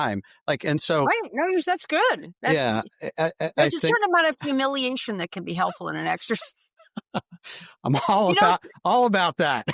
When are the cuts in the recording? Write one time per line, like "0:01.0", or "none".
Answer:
none